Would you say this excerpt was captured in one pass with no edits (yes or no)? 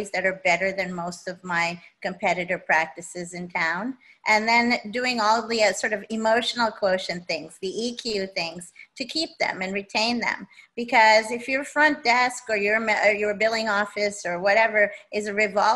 yes